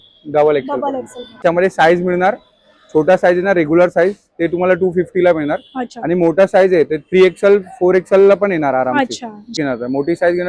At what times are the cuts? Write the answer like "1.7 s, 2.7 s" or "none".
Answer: 1.4 s, 9.5 s